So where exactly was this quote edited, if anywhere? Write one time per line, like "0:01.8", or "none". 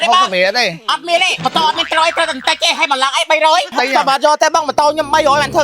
0:01.3
0:03.7

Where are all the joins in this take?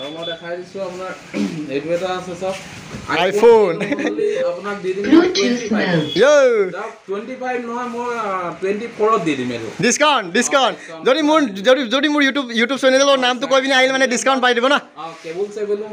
none

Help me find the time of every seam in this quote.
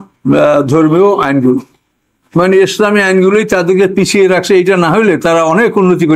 none

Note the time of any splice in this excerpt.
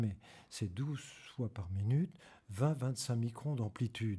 none

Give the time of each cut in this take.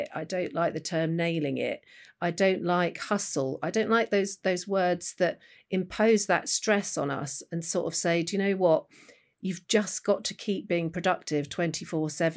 none

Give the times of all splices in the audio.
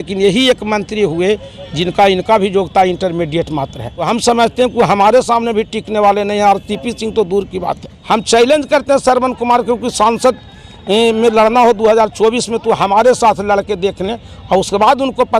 0:03.9
0:07.9

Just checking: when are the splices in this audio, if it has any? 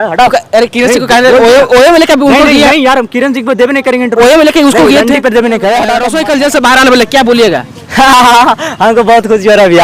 0:06.0

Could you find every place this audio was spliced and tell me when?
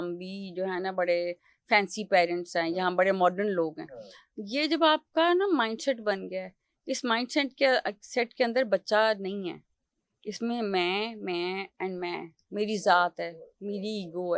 none

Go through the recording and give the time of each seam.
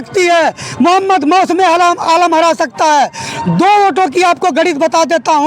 none

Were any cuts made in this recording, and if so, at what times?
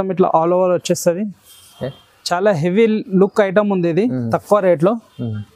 none

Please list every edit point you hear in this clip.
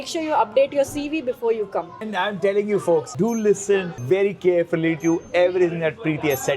0:02.1
0:03.1
0:03.9

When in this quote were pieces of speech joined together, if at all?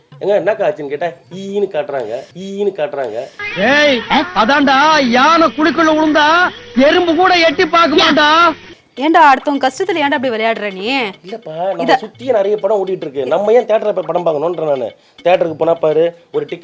none

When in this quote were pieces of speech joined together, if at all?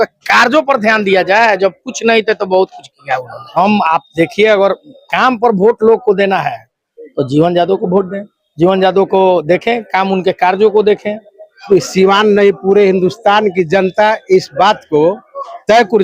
0:03.6
0:11.6

